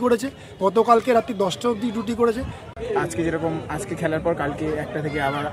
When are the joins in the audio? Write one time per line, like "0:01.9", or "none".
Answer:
0:02.7